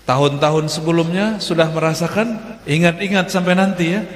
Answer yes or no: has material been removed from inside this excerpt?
yes